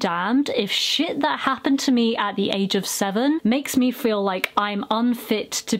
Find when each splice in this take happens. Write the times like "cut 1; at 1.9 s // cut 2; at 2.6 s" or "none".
none